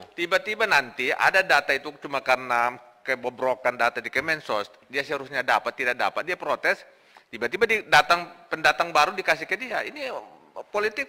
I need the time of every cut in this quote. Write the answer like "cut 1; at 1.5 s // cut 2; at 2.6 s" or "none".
none